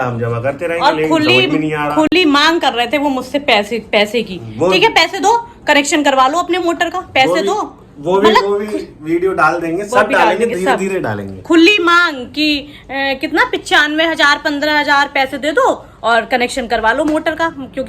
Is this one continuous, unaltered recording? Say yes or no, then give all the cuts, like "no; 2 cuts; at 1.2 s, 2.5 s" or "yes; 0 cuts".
yes; 0 cuts